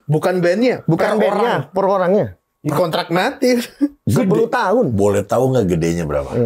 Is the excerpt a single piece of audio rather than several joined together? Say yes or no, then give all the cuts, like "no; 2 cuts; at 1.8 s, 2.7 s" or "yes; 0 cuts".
yes; 0 cuts